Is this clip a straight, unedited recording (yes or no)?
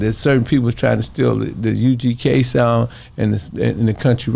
yes